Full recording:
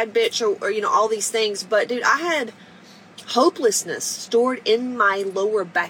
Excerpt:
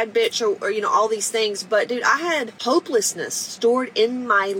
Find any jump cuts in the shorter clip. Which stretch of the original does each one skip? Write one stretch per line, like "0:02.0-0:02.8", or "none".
0:02.5-0:03.2